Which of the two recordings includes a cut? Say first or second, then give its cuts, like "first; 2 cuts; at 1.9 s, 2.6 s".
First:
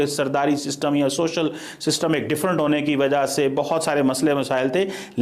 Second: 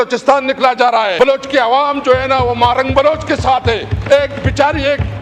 second; 1 cut; at 1.1 s